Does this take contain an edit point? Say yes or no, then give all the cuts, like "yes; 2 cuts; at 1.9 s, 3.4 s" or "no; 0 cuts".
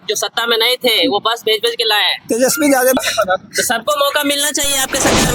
yes; 1 cut; at 3.0 s